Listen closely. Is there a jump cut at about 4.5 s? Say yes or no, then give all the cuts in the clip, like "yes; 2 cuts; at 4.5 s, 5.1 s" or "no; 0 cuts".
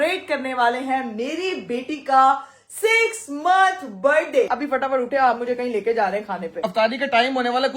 yes; 2 cuts; at 4.5 s, 6.6 s